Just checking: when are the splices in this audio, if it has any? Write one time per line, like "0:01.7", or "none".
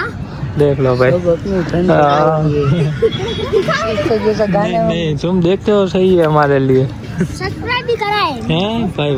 none